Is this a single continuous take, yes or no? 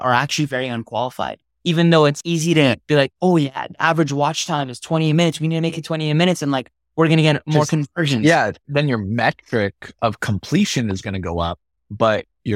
no